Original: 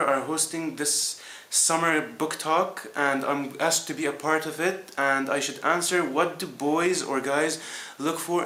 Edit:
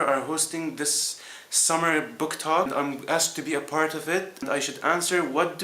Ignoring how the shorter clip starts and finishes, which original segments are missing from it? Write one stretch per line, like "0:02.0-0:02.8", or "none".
0:02.7-0:03.2
0:04.9-0:05.2